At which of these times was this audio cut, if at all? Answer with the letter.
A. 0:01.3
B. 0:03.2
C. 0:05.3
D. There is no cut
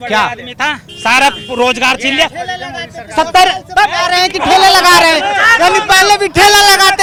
D